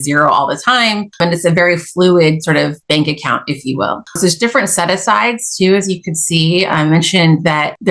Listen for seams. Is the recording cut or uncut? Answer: cut